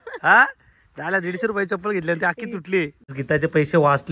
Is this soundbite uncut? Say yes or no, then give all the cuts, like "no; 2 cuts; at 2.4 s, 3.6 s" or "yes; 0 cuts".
no; 1 cut; at 3.1 s